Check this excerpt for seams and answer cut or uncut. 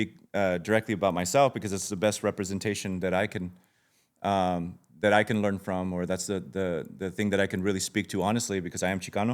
uncut